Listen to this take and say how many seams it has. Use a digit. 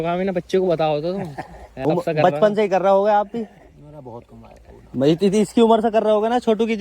1